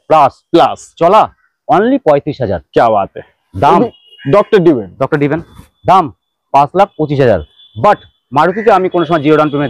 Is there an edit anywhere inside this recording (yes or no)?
no